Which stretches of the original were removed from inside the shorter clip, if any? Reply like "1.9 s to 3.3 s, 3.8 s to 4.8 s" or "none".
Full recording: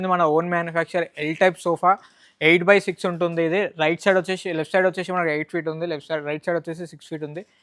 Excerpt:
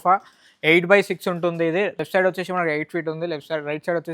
3.7 s to 4.6 s